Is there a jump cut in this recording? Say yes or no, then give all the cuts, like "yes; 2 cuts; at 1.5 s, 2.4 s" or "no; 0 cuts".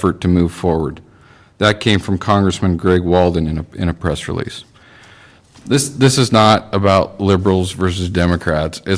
no; 0 cuts